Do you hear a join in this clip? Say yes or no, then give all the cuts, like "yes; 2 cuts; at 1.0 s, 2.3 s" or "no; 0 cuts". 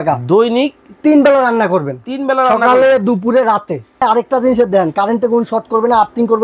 yes; 1 cut; at 4.0 s